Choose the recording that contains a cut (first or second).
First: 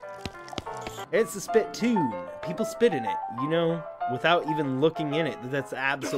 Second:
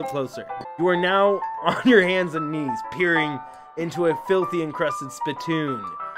first